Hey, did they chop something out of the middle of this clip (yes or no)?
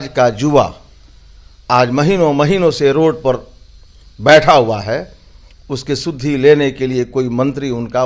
no